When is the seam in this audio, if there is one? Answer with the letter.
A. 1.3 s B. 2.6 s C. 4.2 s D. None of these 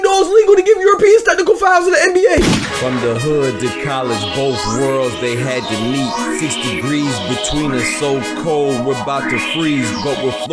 B